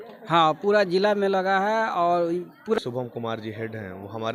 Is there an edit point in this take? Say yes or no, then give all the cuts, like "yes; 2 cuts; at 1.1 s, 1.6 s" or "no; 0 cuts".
yes; 1 cut; at 2.7 s